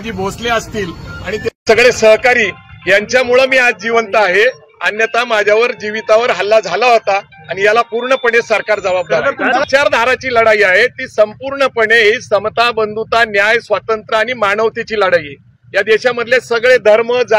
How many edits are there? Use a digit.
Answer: 1